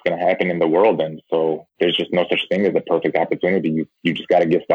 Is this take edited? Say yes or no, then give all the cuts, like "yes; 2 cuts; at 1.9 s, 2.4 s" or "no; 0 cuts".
no; 0 cuts